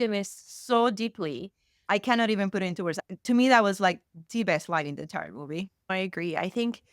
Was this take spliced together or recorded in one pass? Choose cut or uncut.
cut